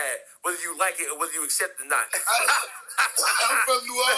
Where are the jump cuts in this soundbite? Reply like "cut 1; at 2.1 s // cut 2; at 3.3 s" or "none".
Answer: cut 1; at 2.1 s